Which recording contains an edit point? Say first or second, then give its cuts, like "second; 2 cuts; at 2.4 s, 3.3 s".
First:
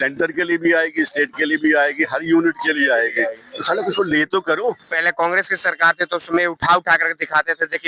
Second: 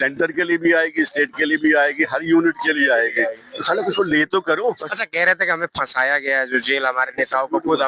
second; 1 cut; at 4.9 s